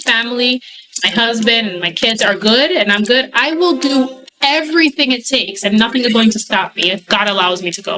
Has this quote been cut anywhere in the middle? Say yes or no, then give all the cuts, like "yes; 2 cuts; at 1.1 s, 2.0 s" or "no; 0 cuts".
no; 0 cuts